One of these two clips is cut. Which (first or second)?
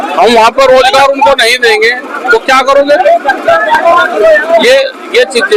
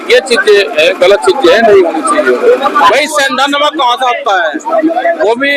second